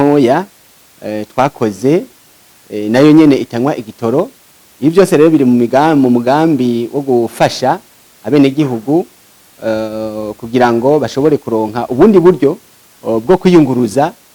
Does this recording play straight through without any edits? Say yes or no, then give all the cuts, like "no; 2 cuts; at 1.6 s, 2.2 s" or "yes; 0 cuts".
yes; 0 cuts